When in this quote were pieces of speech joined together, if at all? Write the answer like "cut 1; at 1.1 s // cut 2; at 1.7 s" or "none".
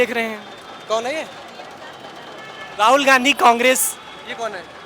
none